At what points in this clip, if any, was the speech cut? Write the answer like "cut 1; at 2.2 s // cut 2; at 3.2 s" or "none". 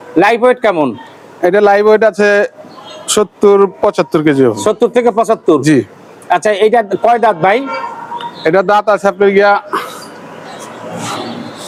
none